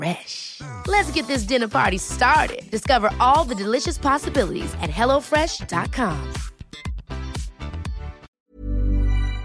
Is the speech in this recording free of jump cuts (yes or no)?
no